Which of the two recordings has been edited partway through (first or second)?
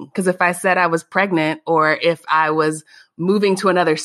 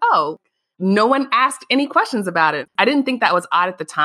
second